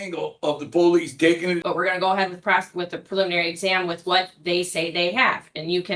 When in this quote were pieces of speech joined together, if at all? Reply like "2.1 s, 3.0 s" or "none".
1.6 s